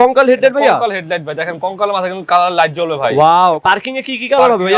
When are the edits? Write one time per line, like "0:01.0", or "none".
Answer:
0:03.6